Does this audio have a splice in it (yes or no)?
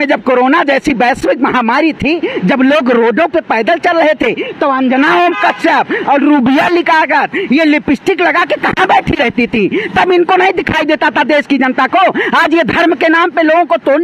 no